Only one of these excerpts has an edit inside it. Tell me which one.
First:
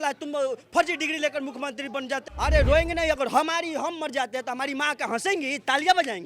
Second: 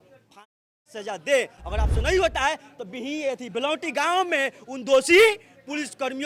first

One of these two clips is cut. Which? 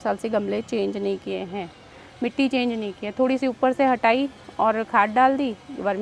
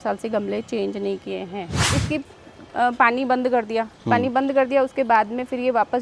second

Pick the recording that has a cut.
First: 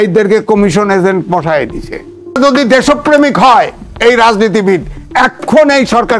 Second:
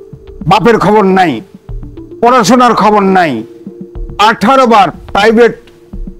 first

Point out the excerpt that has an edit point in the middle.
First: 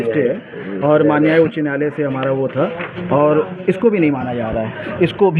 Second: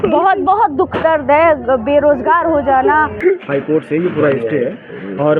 second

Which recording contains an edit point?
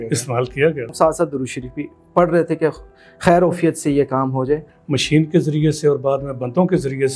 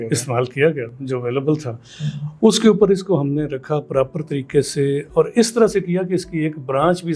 first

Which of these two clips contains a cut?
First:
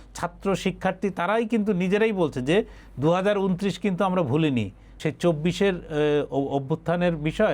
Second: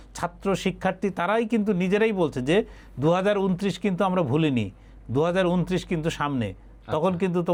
first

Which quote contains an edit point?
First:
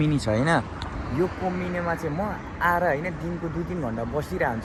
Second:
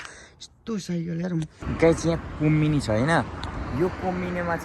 second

